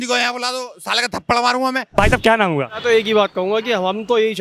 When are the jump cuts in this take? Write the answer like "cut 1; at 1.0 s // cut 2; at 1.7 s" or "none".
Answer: none